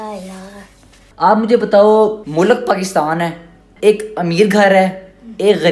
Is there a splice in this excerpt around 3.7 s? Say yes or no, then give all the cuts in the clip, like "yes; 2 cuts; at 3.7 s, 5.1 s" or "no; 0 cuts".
yes; 1 cut; at 3.7 s